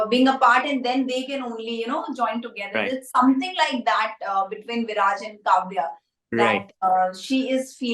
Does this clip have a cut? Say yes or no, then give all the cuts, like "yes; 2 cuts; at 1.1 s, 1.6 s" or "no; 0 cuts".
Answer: no; 0 cuts